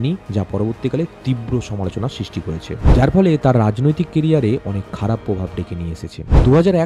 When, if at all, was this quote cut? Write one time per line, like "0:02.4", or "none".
none